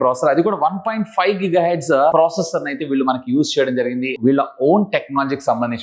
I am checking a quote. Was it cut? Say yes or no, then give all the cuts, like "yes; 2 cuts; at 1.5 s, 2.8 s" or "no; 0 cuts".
yes; 1 cut; at 4.1 s